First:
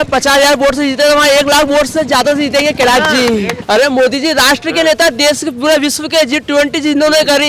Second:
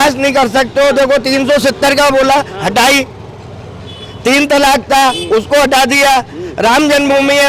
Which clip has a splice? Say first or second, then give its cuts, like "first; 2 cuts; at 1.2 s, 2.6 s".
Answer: first; 1 cut; at 3.6 s